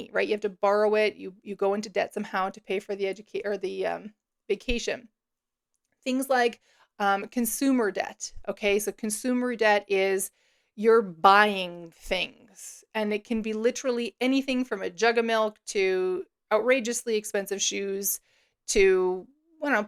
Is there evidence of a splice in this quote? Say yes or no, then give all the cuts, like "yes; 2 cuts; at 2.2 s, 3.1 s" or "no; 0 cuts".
no; 0 cuts